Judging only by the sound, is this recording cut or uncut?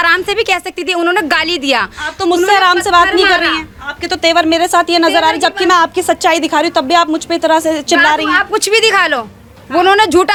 uncut